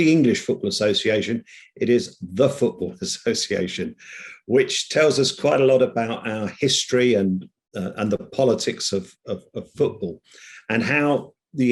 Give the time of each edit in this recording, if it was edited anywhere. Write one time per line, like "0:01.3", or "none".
none